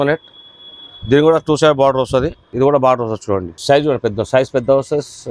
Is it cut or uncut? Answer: cut